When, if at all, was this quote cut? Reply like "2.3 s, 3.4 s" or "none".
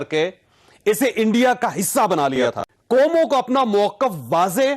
2.7 s